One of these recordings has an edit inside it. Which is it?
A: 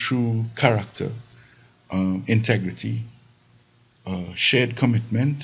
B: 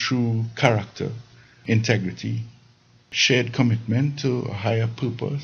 B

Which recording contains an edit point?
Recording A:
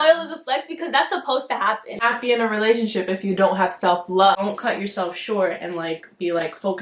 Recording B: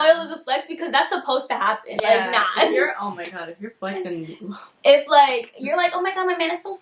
A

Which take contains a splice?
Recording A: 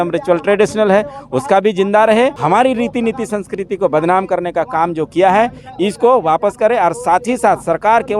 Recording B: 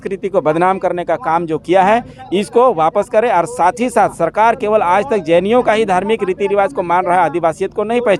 A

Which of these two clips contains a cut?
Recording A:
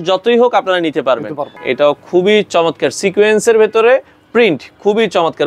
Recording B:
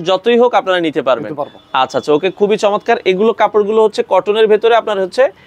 A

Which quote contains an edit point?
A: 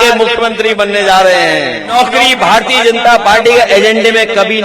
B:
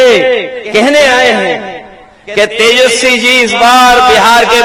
A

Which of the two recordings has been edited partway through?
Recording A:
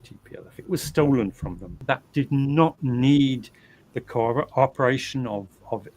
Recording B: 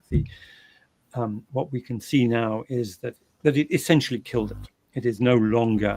A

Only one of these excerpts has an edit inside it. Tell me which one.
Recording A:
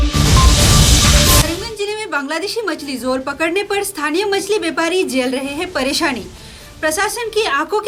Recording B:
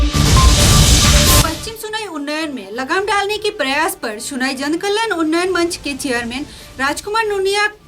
B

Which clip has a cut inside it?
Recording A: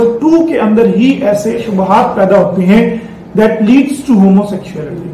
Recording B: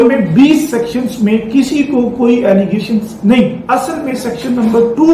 B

